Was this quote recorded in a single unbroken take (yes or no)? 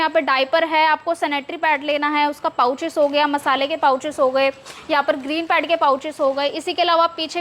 yes